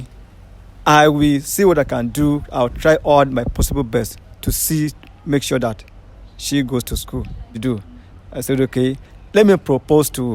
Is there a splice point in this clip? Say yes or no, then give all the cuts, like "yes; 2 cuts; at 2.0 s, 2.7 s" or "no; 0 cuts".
yes; 1 cut; at 7.5 s